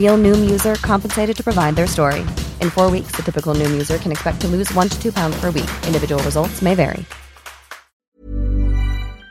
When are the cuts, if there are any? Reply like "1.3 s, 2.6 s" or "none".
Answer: 8.1 s